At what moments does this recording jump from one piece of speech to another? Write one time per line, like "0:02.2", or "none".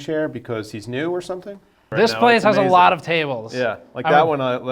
0:01.9

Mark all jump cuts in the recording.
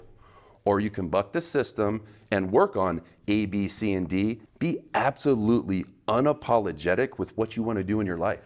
0:04.4

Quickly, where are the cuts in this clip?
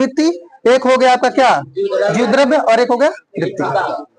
none

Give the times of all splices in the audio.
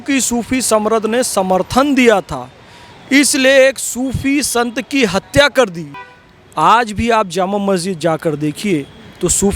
none

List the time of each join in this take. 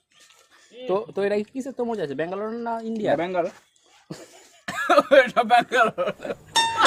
none

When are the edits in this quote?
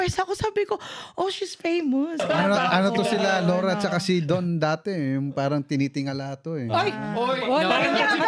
0:02.2

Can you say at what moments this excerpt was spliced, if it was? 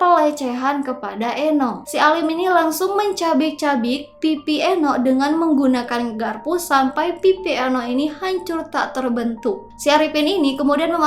0:01.8
0:09.7

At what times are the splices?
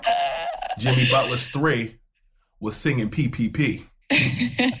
0:03.9

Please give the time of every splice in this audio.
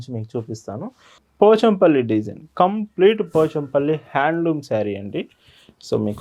0:01.2

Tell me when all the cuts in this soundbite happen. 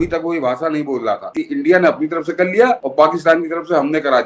0:01.3
0:02.9

